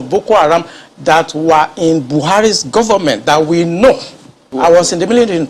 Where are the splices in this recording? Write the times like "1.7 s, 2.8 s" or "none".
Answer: 4.4 s

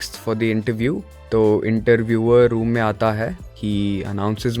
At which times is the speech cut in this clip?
1.1 s, 3.5 s

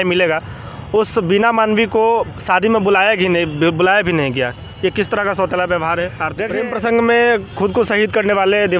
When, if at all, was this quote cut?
6.6 s

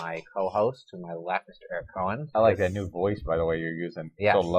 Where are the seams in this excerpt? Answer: 1.8 s

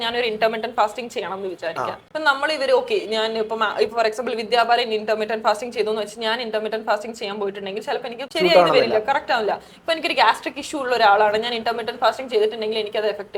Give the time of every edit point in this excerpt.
2.0 s, 8.2 s

